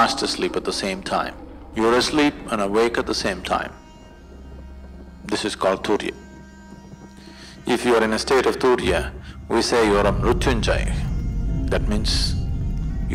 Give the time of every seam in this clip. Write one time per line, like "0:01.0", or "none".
none